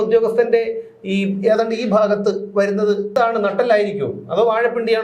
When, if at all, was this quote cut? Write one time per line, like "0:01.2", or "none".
0:03.1